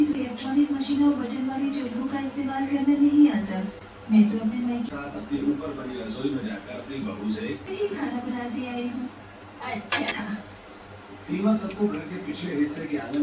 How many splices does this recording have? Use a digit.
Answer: 1